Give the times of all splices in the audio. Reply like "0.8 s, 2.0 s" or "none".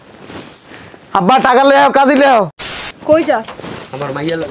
2.6 s